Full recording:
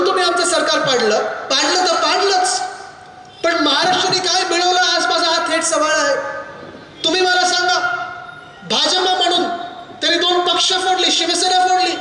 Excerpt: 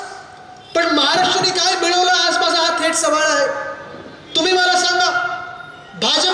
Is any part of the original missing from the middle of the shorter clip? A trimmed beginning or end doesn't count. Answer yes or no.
no